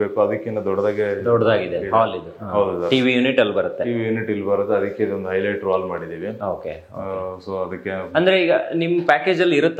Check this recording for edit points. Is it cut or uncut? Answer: uncut